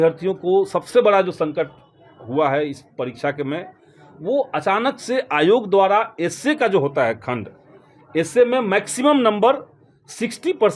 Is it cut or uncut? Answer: uncut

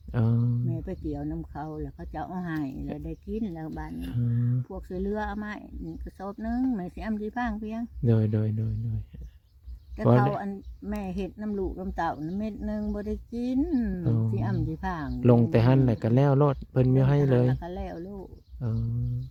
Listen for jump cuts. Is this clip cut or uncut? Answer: uncut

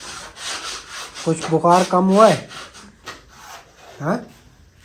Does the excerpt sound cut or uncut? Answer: uncut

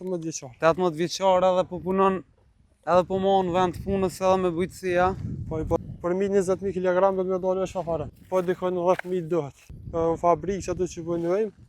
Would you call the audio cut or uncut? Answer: cut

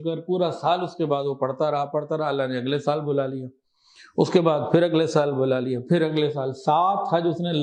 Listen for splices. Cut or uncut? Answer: uncut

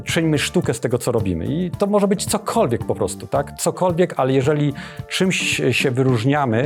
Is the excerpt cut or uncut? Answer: uncut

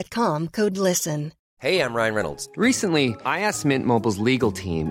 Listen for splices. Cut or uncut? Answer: cut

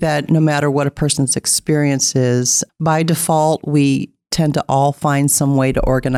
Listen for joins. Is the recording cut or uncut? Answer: uncut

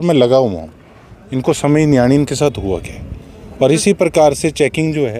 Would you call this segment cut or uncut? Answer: uncut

